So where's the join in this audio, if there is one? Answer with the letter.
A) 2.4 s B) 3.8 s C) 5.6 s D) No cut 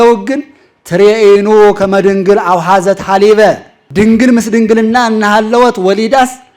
B